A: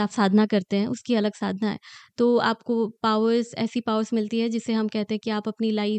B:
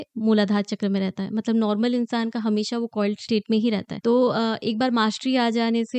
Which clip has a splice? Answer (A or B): B